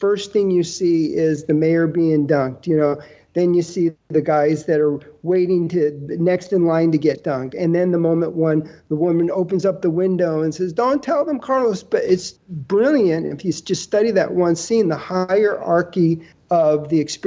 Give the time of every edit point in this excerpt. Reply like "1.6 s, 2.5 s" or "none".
4.0 s, 12.3 s, 16.3 s